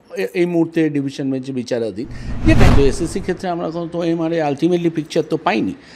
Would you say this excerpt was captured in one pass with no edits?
no; 1 cut; at 2.6 s

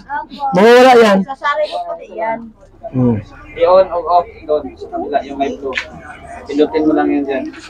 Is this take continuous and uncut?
yes; 0 cuts

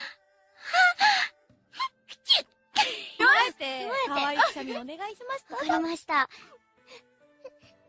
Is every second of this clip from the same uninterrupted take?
yes; 0 cuts

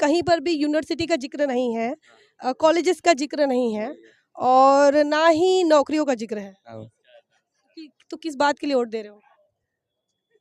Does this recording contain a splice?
no; 0 cuts

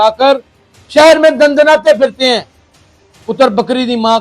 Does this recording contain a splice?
no; 0 cuts

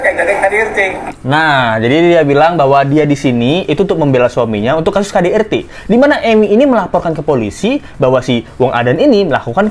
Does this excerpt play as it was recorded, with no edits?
yes; 0 cuts

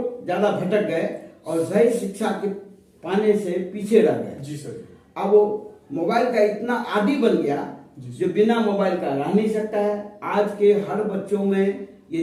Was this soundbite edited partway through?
no; 0 cuts

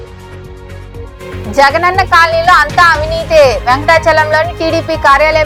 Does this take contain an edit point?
no; 0 cuts

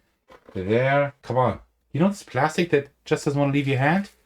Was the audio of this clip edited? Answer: yes; 1 cut; at 1.2 s

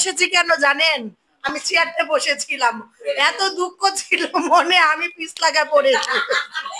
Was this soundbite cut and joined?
no; 0 cuts

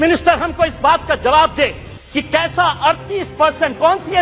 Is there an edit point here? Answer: no; 0 cuts

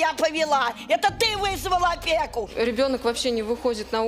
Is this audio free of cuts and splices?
no; 1 cut; at 2.5 s

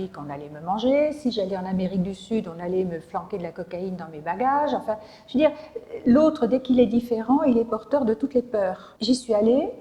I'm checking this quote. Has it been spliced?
yes; 1 cut; at 8.9 s

